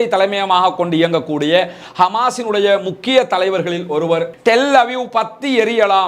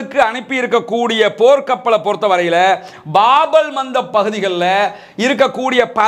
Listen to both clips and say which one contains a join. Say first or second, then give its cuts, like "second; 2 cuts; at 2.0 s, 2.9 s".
first; 1 cut; at 4.3 s